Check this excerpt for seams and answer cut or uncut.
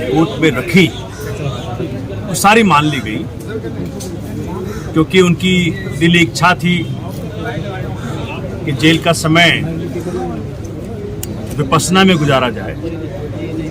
uncut